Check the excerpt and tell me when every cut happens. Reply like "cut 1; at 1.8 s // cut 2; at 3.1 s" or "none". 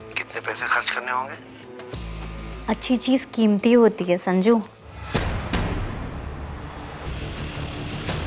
cut 1; at 7.1 s